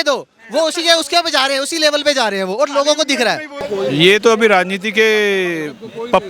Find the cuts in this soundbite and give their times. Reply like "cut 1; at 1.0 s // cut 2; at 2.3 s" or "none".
cut 1; at 3.6 s